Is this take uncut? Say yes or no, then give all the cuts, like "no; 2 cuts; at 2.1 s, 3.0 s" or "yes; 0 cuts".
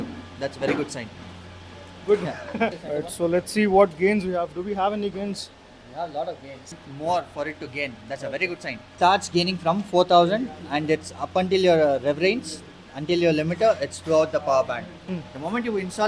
no; 4 cuts; at 2.9 s, 6.6 s, 8.9 s, 14.9 s